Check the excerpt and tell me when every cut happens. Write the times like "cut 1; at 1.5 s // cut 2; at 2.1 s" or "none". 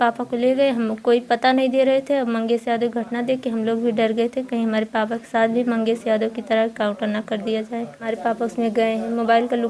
cut 1; at 8.1 s